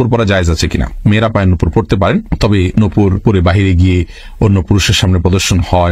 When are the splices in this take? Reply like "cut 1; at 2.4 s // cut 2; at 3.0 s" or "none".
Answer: none